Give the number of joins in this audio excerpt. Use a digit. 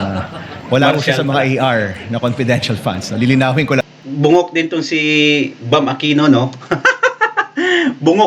1